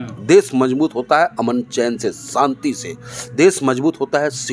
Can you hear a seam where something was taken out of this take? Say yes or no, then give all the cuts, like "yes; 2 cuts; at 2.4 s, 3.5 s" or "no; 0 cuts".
no; 0 cuts